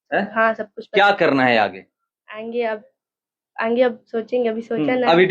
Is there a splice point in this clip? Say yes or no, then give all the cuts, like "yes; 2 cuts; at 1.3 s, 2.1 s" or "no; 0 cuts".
no; 0 cuts